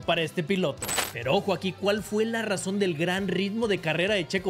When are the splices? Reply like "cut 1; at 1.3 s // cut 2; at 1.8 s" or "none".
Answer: cut 1; at 1.0 s